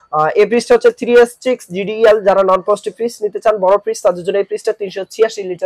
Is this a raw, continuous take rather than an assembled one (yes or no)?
yes